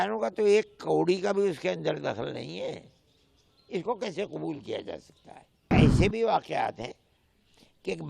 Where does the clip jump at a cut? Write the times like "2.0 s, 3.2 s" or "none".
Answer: 5.7 s

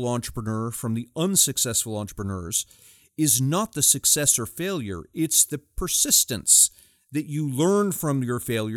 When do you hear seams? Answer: none

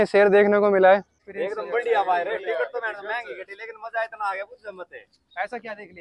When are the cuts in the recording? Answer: 1.2 s

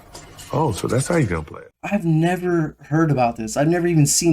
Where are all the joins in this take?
1.5 s

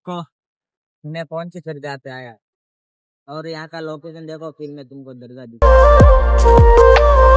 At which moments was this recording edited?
5.6 s

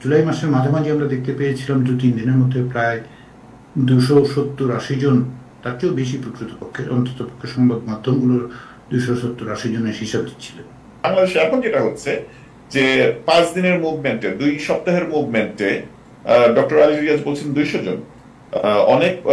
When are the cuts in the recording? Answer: 11.1 s

